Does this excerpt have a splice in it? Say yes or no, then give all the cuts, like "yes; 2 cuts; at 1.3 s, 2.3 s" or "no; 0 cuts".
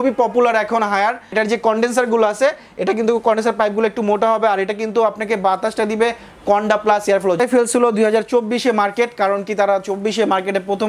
yes; 2 cuts; at 1.3 s, 7.4 s